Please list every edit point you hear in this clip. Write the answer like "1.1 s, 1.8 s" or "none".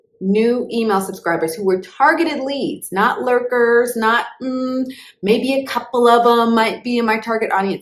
none

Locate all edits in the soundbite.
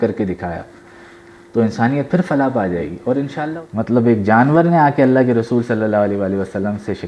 3.4 s

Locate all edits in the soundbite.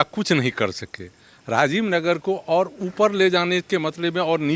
none

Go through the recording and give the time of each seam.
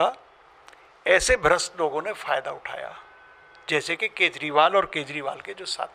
none

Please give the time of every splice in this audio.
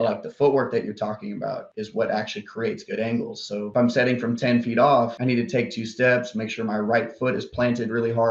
1.7 s

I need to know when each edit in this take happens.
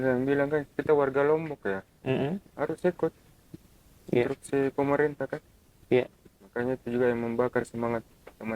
none

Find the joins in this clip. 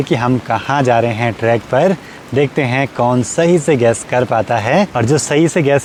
none

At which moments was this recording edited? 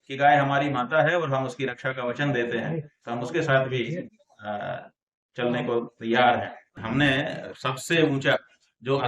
6.8 s

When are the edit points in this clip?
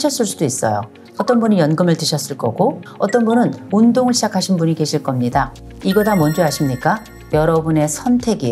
1.0 s, 3.6 s, 5.6 s

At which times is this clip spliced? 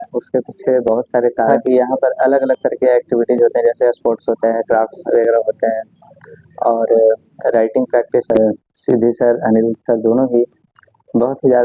1.6 s, 8.3 s

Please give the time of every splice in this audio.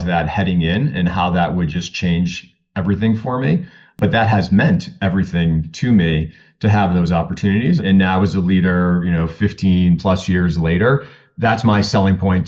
4.0 s, 7.8 s

